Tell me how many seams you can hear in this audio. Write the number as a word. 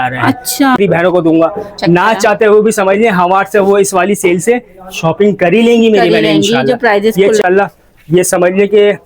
two